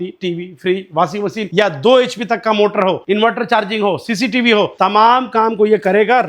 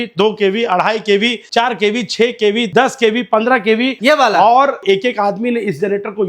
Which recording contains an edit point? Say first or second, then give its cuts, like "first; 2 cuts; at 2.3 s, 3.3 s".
second; 3 cuts; at 2.7 s, 4.0 s, 4.8 s